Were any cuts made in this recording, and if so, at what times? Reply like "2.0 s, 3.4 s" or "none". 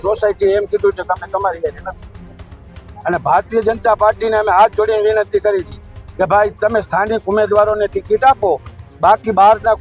none